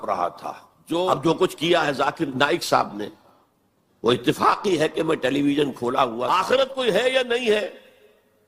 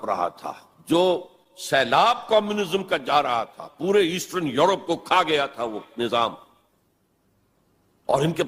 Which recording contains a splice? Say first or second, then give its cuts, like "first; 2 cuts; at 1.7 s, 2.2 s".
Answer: first; 2 cuts; at 1.1 s, 6.2 s